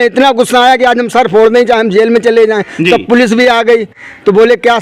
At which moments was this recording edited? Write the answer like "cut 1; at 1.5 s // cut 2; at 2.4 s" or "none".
none